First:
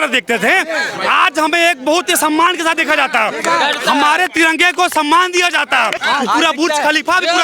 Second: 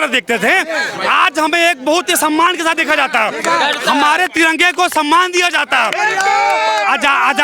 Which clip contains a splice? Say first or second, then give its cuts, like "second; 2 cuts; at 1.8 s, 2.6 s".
first; 1 cut; at 5.9 s